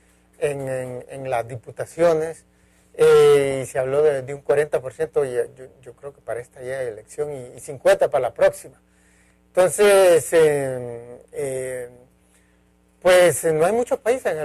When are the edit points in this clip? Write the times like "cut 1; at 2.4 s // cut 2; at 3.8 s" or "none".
cut 1; at 12.4 s